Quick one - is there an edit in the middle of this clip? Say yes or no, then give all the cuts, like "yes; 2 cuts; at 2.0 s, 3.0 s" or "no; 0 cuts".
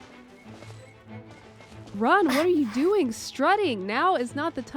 no; 0 cuts